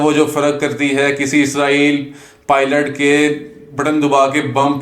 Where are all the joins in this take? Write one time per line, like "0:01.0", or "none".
none

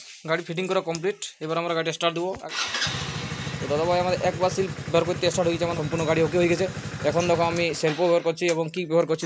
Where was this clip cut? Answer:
0:02.4
0:05.8
0:08.0

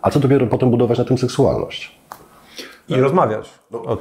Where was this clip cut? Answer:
none

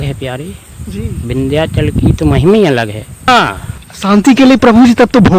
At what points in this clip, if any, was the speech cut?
0:03.3

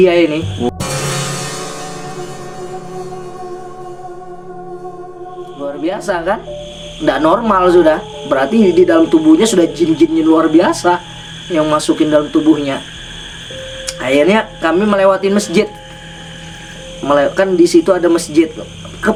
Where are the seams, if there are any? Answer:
none

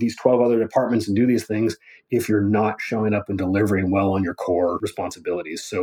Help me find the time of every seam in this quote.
0:04.8

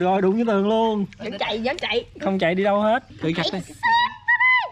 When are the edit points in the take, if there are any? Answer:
0:03.1

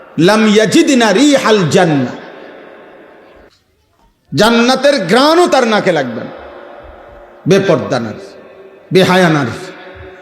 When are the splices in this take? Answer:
0:03.5

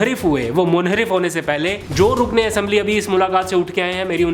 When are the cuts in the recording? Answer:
0:01.8

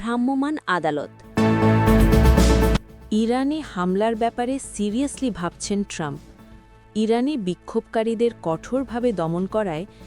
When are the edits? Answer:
0:01.2
0:02.9

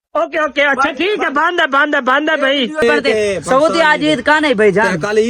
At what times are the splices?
0:02.8

